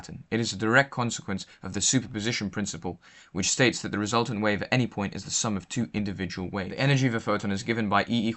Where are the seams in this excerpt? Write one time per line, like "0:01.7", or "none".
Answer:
0:06.7